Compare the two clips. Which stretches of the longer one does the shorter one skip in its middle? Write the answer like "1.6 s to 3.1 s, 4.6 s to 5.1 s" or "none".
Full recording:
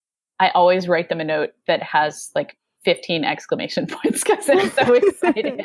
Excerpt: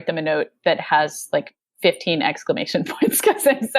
none